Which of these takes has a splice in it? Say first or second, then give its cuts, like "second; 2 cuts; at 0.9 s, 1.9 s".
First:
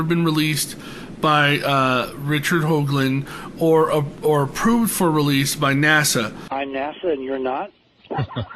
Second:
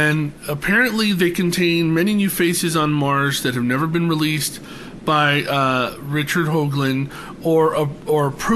first; 1 cut; at 6.4 s